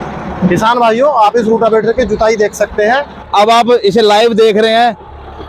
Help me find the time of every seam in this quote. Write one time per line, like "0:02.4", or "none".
0:03.5